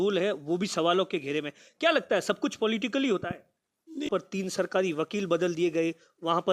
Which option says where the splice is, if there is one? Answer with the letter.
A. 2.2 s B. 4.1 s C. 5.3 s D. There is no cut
B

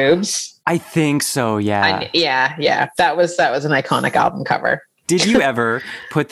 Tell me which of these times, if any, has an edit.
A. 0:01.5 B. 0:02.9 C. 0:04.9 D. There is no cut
C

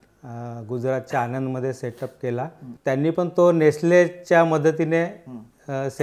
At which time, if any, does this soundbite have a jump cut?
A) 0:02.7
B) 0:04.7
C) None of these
A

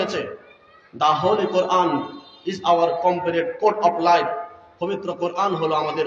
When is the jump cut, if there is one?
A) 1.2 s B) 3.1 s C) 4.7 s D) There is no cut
D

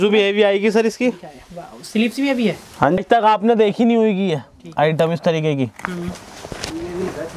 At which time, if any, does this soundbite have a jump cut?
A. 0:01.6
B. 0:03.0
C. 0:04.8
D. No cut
B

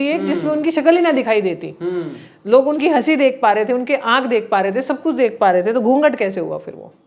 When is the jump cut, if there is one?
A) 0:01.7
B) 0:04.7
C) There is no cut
C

